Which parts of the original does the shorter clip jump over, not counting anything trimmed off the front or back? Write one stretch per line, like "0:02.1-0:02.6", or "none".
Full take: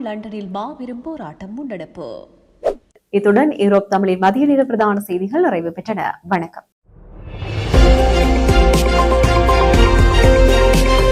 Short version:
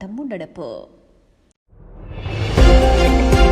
0:02.6-0:06.4